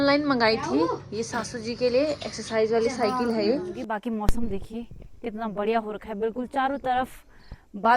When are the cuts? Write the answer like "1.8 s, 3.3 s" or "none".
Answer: 3.8 s